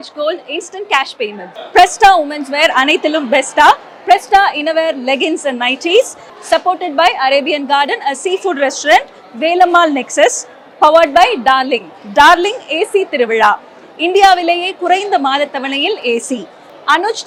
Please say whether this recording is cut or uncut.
uncut